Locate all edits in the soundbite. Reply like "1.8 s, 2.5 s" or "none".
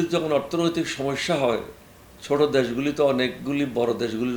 none